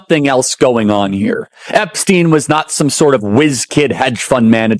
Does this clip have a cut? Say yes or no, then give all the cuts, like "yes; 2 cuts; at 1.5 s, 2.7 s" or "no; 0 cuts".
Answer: no; 0 cuts